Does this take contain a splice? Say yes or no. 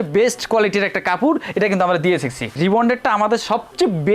yes